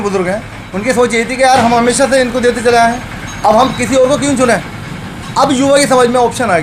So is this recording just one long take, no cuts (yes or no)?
yes